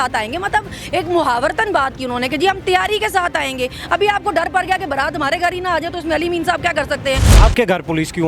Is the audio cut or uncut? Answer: cut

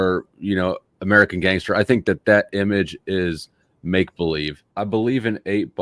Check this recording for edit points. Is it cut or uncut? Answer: cut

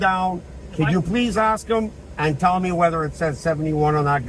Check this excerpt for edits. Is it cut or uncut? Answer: uncut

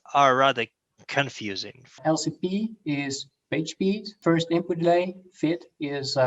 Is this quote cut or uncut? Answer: cut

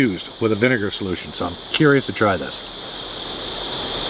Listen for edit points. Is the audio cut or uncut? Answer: uncut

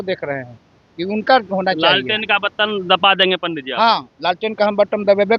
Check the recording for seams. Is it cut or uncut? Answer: uncut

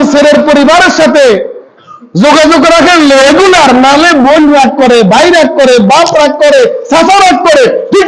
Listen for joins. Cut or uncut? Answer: uncut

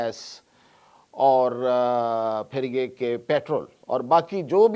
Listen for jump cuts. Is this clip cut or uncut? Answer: cut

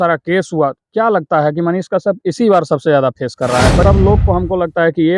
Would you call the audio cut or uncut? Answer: cut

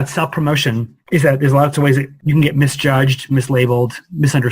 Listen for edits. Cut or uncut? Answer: cut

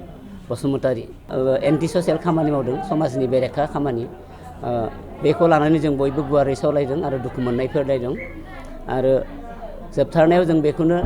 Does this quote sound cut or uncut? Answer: cut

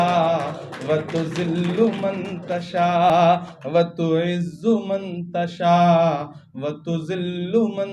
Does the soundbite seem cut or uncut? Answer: uncut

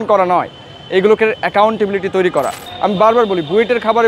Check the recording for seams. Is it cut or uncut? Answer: cut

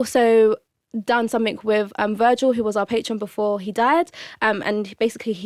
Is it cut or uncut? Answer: uncut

